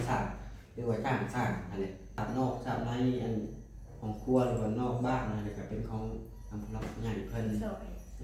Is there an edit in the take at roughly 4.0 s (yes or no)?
no